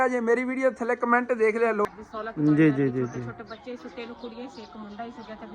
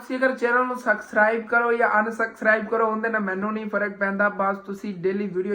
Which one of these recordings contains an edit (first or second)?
first